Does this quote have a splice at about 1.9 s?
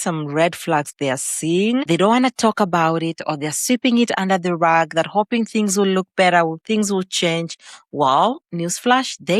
yes; 1 cut; at 1.9 s

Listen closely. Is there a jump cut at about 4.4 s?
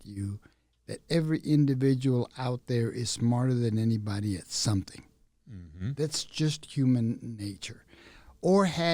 no; 0 cuts

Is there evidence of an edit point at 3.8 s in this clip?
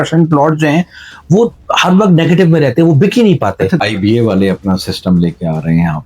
yes; 1 cut; at 3.8 s

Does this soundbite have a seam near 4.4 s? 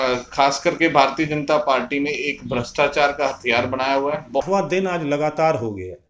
yes; 1 cut; at 4.4 s

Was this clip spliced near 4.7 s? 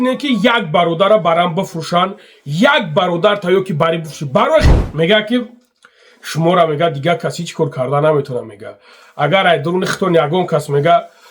yes; 1 cut; at 4.7 s

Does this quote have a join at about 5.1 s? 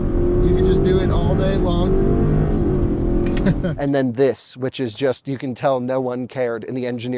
no; 1 cut; at 3.7 s

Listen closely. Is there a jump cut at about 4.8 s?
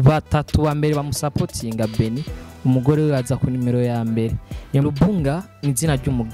yes; 1 cut; at 4.8 s

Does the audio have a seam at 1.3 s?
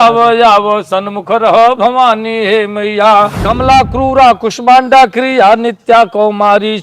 no; 1 cut; at 3.3 s

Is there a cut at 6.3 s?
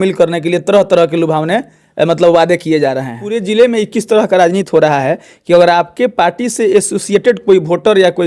no; 1 cut; at 3.3 s

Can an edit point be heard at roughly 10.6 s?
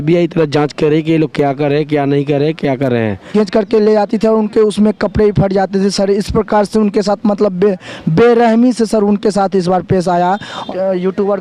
yes; 2 cuts; at 3.3 s, 10.6 s

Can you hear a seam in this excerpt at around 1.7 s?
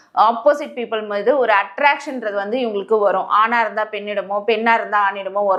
no; 0 cuts

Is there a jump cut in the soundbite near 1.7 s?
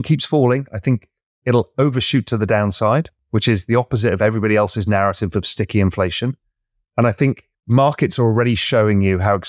no; 2 cuts; at 3.2 s, 7.5 s

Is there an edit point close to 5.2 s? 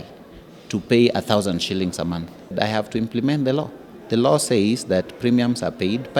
no; 1 cut; at 2.5 s

